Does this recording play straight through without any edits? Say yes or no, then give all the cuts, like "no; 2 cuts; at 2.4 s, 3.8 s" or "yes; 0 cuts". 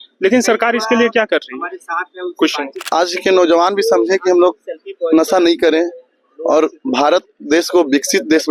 no; 1 cut; at 2.8 s